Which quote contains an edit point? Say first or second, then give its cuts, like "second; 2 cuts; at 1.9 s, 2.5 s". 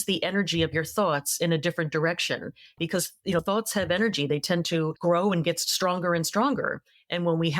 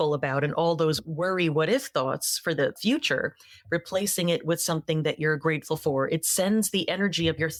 first; 2 cuts; at 2.8 s, 4.9 s